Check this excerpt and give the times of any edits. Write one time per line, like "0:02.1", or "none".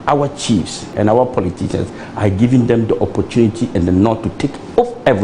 0:00.9